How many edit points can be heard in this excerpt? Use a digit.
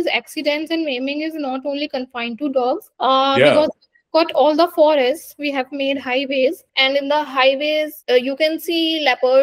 0